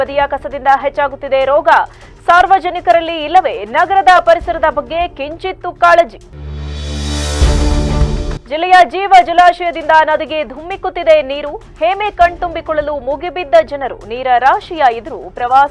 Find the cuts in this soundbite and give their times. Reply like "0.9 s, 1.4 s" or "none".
none